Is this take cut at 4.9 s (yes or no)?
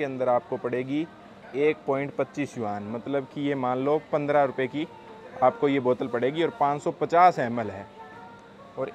no